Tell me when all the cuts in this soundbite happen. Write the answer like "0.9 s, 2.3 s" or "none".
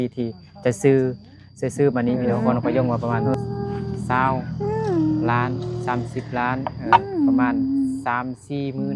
2.2 s